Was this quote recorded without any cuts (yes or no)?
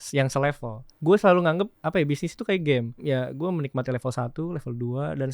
no